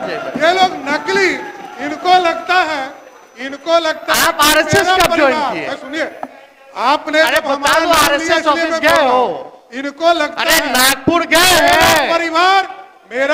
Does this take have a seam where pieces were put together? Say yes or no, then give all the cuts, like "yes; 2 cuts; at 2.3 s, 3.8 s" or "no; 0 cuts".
no; 0 cuts